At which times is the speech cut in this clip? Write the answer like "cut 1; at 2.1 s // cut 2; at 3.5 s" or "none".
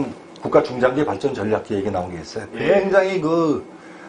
none